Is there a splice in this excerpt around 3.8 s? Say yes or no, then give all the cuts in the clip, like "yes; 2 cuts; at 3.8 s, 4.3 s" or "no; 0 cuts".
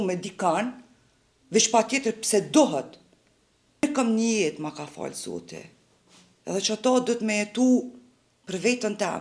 yes; 1 cut; at 3.8 s